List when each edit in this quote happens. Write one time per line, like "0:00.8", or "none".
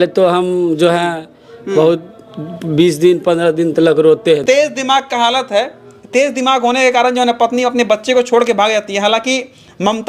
0:04.4